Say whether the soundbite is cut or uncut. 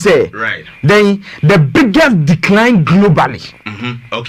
uncut